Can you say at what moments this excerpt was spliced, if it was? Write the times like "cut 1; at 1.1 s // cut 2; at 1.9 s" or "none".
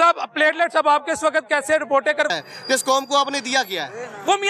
cut 1; at 2.3 s